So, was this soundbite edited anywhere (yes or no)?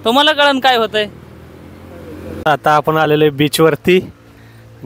yes